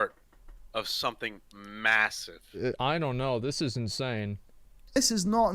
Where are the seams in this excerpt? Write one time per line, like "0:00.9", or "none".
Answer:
0:02.6